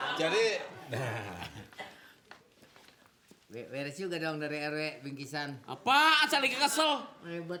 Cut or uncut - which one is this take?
uncut